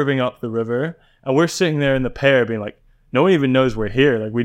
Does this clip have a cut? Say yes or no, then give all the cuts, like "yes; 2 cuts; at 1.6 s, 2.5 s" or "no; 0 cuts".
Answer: no; 0 cuts